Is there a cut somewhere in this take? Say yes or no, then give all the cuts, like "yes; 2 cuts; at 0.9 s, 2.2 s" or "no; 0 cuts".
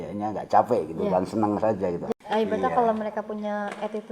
yes; 1 cut; at 2.0 s